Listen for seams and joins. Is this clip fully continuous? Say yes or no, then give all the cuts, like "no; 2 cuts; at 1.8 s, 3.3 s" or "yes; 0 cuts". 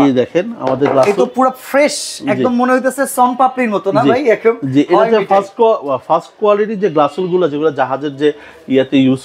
yes; 0 cuts